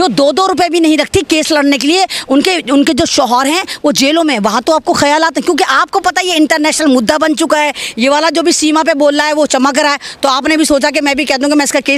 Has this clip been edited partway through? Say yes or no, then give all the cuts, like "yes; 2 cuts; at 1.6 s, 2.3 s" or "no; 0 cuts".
no; 0 cuts